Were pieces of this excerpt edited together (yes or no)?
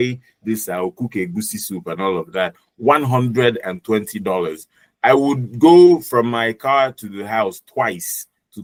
no